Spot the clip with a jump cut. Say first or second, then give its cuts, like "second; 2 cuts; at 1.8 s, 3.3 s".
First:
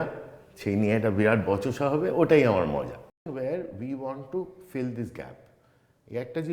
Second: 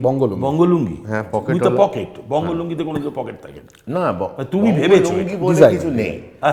first; 1 cut; at 3.3 s